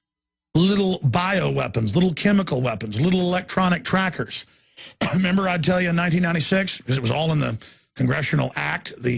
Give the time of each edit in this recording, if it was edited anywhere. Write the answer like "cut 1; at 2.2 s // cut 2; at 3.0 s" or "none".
cut 1; at 3.1 s